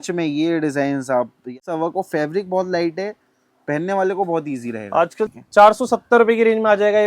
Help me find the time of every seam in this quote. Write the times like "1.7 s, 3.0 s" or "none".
1.5 s, 5.3 s

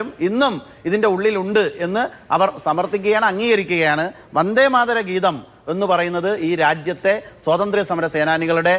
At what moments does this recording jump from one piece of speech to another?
4.1 s

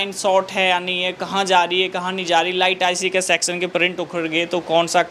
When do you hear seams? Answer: none

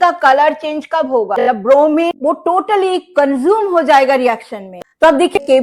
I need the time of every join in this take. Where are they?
1.3 s, 4.7 s

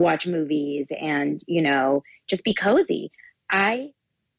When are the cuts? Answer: none

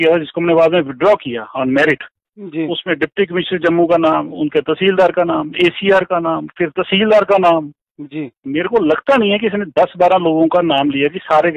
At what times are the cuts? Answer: none

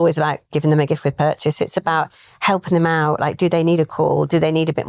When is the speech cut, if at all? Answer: none

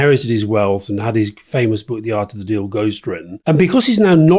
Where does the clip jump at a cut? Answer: none

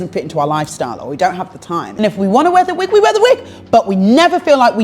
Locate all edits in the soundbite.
1.9 s

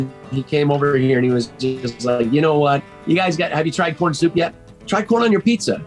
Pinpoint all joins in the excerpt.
2.9 s, 4.7 s

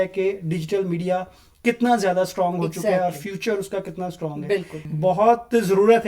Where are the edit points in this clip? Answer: 4.8 s

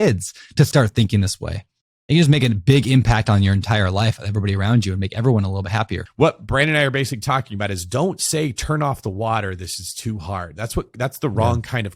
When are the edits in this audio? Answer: 6.0 s

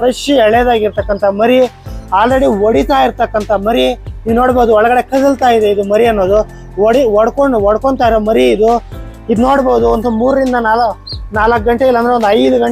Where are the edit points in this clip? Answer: none

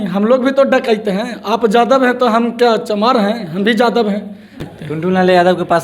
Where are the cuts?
4.5 s

